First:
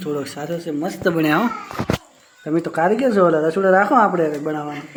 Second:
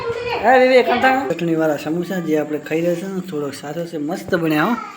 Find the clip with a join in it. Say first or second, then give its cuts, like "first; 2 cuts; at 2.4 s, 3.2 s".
second; 1 cut; at 1.3 s